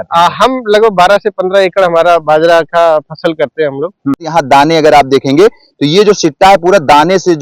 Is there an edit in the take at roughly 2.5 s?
no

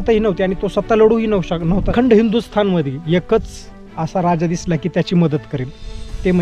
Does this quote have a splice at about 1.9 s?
yes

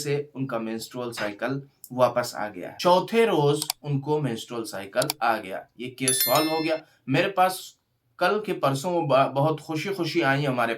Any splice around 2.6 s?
yes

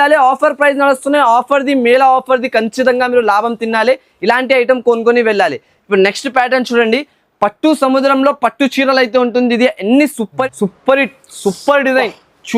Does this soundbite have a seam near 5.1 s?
no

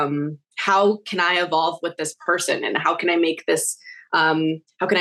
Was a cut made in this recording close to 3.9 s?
no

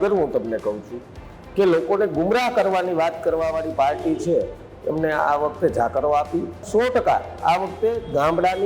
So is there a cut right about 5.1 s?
no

